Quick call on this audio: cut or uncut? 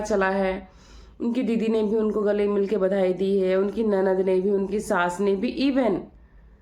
uncut